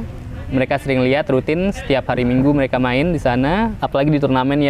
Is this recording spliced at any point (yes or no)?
yes